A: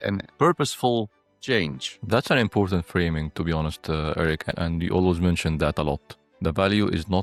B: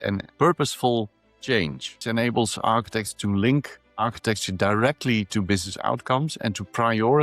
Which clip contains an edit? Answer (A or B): B